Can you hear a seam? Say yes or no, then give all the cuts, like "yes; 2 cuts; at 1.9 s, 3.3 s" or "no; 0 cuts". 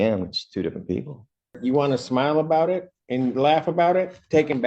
yes; 1 cut; at 1.5 s